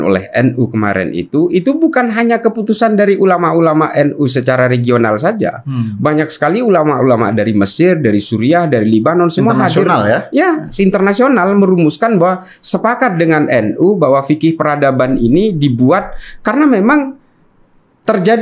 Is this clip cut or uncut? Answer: uncut